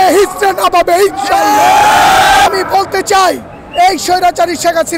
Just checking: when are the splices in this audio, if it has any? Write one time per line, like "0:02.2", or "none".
0:02.5